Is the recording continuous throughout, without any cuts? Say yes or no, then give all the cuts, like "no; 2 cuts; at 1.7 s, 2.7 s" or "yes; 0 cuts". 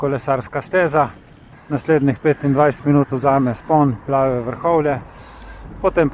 yes; 0 cuts